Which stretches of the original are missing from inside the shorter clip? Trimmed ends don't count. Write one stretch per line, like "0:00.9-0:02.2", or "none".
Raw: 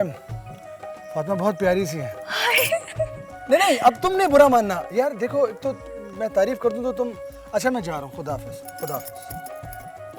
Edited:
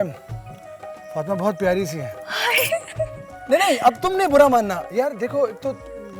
none